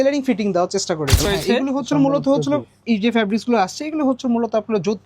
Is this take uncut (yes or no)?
no